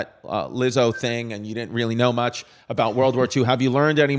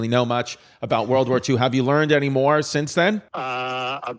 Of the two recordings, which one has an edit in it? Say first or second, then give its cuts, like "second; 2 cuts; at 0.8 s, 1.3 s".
second; 1 cut; at 3.3 s